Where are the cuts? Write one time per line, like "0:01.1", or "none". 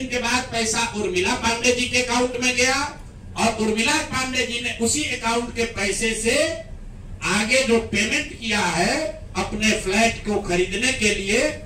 none